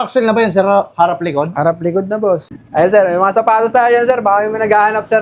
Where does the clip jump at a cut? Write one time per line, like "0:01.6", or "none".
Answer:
0:02.5